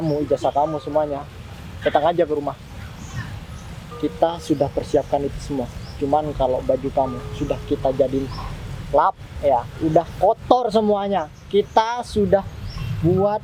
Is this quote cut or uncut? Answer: uncut